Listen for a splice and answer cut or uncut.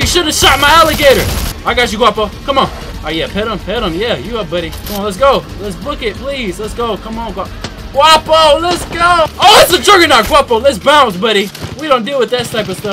cut